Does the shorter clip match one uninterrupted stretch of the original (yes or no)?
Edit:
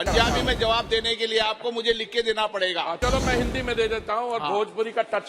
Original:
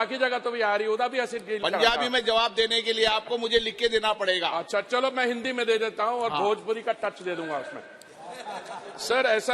no